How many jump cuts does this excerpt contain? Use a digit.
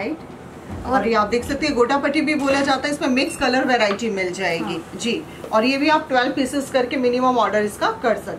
0